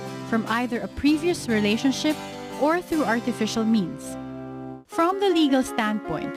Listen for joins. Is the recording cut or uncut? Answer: cut